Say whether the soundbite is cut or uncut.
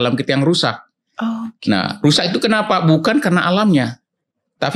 uncut